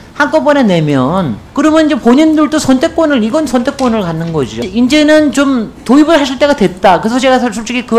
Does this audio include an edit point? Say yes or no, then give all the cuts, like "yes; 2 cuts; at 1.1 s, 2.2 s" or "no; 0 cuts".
yes; 2 cuts; at 1.4 s, 4.6 s